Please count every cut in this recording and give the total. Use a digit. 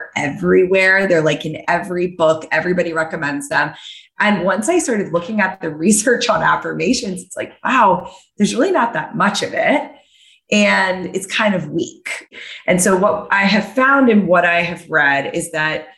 2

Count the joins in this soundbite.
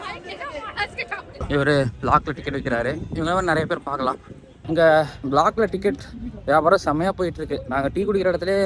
1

